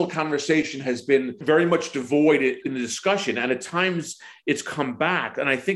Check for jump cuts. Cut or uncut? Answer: cut